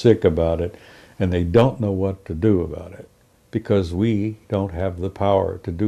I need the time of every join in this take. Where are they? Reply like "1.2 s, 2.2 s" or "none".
none